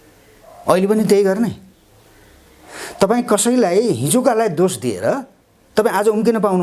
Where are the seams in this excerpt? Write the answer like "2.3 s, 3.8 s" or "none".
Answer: none